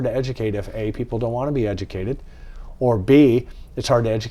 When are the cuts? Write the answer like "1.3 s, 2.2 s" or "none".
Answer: none

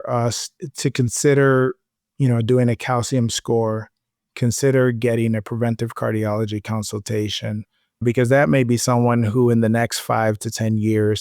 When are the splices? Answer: 8.0 s

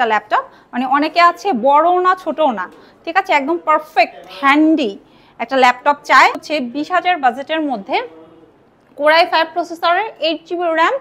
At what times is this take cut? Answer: 6.4 s

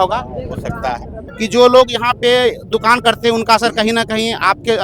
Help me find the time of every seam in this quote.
1.1 s

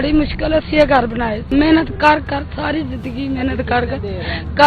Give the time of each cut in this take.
1.5 s

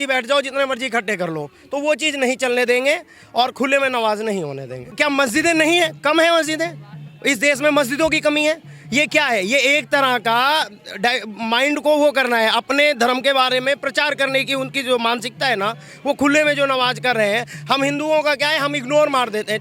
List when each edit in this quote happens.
4.9 s

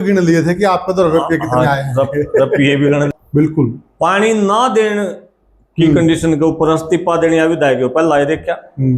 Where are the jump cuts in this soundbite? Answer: 3.1 s

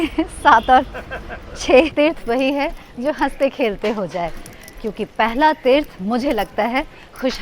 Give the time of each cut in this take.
1.9 s

